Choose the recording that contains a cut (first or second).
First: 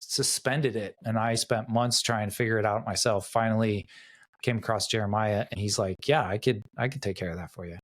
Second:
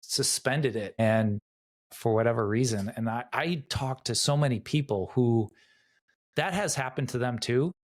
first